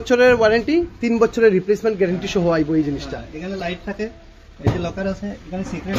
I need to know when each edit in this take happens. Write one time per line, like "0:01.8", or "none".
none